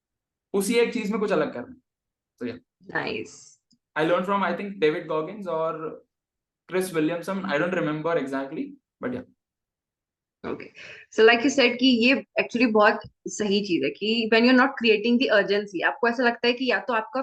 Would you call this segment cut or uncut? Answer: uncut